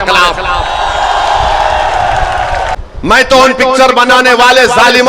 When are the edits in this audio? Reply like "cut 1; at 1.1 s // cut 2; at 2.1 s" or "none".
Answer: cut 1; at 2.8 s

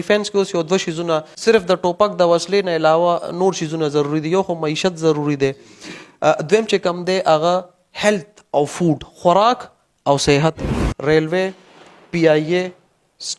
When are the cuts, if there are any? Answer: cut 1; at 1.3 s // cut 2; at 10.6 s

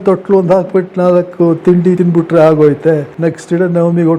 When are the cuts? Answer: cut 1; at 2.0 s // cut 2; at 3.1 s

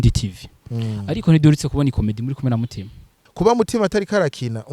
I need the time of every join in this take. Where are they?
cut 1; at 3.2 s

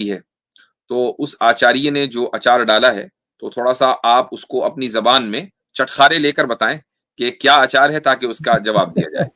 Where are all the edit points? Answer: none

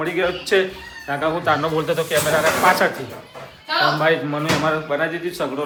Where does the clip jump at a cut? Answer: none

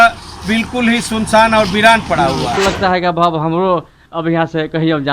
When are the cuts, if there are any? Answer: cut 1; at 2.6 s

